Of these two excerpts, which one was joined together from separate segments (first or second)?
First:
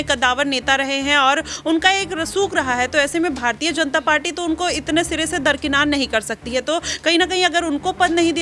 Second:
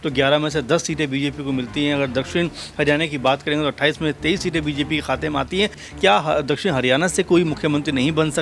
second